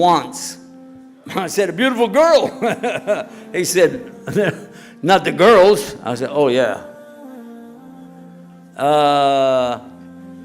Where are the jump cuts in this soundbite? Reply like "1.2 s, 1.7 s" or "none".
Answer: 7.2 s, 8.7 s